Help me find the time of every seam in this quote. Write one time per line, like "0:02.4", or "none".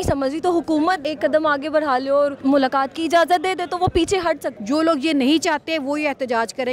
0:01.1
0:02.4
0:04.5